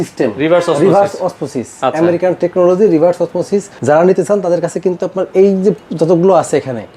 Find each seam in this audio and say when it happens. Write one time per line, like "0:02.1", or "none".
0:03.7